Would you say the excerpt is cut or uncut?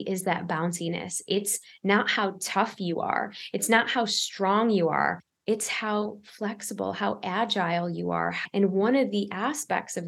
cut